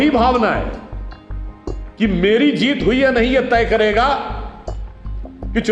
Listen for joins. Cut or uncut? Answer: uncut